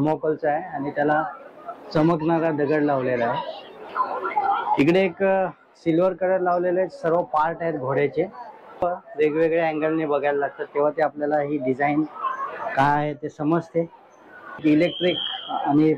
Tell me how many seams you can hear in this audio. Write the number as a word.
two